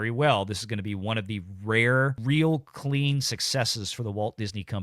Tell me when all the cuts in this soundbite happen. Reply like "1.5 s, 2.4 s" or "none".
2.2 s